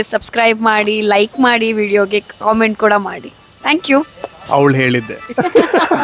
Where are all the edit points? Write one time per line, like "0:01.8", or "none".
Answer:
none

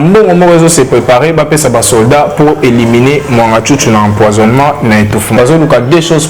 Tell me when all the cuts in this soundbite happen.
0:05.3

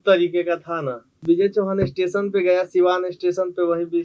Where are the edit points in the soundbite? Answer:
0:01.2

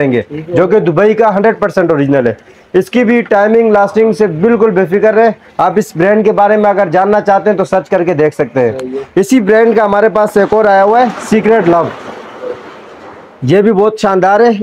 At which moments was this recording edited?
none

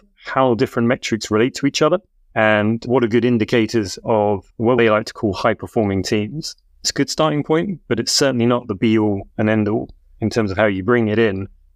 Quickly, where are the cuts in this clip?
0:02.2
0:04.0
0:06.9
0:10.2

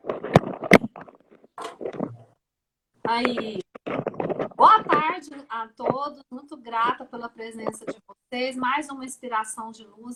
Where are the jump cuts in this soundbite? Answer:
none

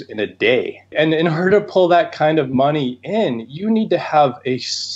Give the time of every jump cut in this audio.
0:00.9

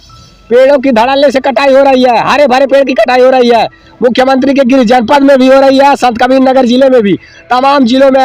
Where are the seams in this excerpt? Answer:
none

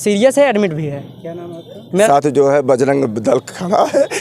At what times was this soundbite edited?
0:02.1

